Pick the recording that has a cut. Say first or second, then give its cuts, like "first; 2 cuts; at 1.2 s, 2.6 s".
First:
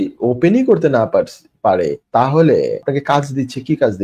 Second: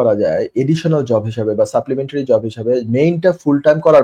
first; 2 cuts; at 2.0 s, 2.8 s